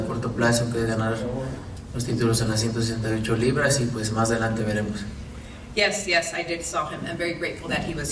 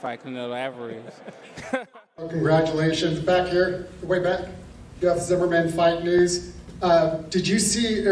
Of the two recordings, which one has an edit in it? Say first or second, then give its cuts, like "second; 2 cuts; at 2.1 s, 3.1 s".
second; 1 cut; at 2.0 s